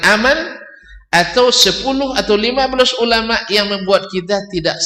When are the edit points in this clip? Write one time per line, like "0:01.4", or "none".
none